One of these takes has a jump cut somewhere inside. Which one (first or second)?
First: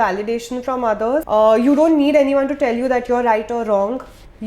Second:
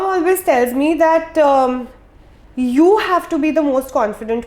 first